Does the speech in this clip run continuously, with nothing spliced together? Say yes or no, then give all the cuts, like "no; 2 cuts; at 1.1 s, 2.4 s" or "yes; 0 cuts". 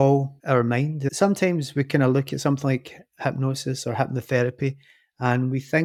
yes; 0 cuts